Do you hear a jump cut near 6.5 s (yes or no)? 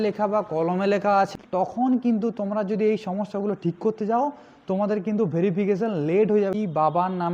yes